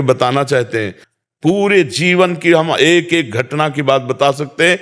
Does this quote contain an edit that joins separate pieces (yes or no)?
yes